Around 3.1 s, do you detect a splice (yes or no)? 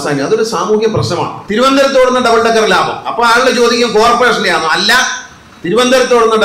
no